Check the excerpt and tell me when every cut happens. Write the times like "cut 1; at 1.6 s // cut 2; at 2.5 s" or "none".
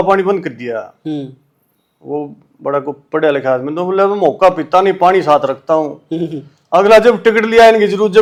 none